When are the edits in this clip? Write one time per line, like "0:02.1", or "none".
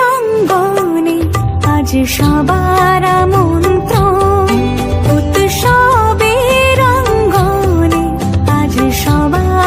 none